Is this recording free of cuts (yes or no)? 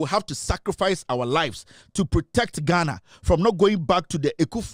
yes